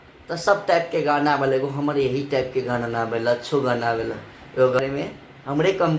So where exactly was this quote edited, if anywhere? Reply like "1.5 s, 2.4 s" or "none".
4.8 s